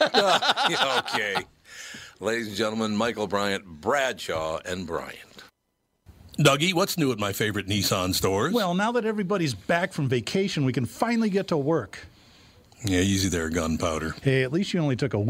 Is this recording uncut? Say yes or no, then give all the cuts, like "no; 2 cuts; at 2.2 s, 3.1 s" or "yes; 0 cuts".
no; 1 cut; at 6.3 s